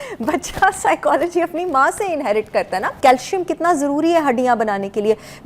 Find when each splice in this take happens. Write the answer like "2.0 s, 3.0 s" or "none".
2.9 s